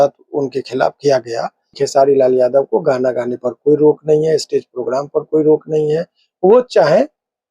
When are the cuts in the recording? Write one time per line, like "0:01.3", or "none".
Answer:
0:01.6